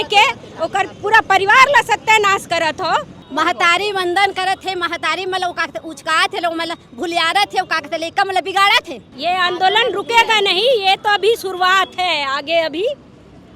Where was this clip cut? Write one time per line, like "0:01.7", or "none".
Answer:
0:03.2
0:09.0